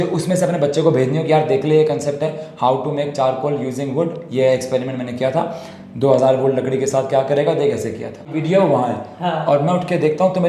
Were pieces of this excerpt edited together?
yes; 1 cut; at 8.4 s

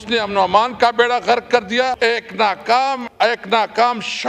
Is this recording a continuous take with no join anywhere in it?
no; 2 cuts; at 2.0 s, 3.4 s

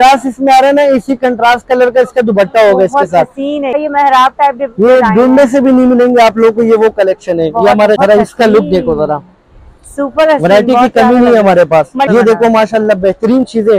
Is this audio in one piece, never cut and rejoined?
no; 3 cuts; at 3.7 s, 8.0 s, 12.1 s

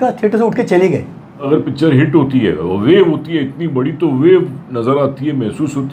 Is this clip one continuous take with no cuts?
no; 1 cut; at 1.5 s

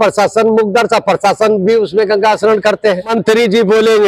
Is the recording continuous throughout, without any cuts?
yes; 0 cuts

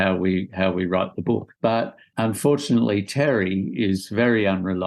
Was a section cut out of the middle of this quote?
yes; 1 cut; at 1.6 s

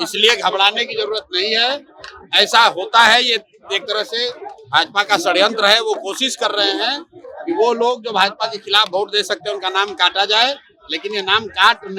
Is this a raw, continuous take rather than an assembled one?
yes; 0 cuts

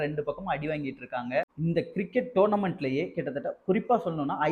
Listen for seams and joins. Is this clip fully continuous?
no; 1 cut; at 1.5 s

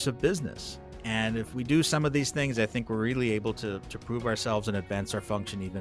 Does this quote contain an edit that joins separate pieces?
no; 0 cuts

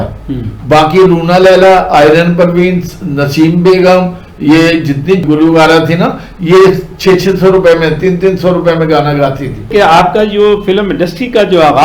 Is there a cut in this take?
yes; 1 cut; at 9.7 s

